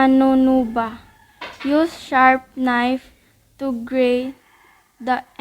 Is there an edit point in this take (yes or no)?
yes